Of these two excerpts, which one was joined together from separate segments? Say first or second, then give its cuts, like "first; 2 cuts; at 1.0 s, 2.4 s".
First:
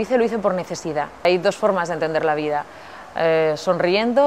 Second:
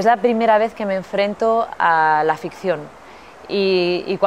first; 1 cut; at 1.2 s